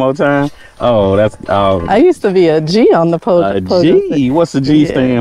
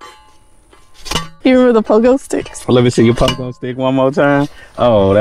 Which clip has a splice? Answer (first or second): second